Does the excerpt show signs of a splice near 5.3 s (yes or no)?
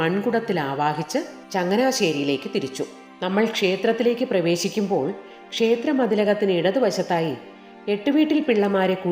no